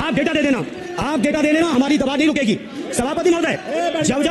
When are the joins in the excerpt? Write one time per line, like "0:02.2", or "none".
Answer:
none